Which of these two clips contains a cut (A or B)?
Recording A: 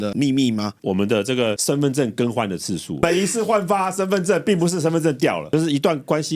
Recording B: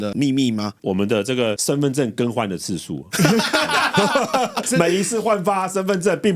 A